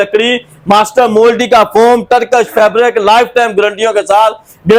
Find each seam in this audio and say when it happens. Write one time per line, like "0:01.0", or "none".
none